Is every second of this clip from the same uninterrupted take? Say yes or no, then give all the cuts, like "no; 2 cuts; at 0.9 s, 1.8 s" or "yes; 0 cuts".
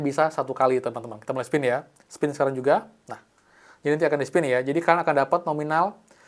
yes; 0 cuts